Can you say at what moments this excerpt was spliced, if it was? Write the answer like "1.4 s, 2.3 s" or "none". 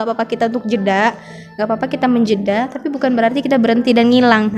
none